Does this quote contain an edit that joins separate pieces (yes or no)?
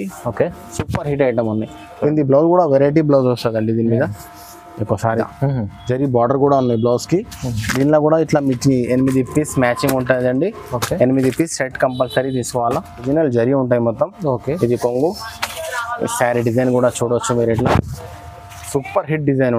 yes